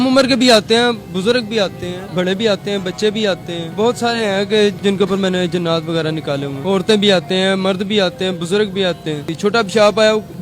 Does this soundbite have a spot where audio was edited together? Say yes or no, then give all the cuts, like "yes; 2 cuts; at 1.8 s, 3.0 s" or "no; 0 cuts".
yes; 5 cuts; at 1.1 s, 2.0 s, 3.7 s, 6.6 s, 9.3 s